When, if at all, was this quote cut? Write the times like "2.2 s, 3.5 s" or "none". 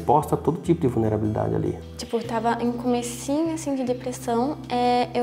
1.8 s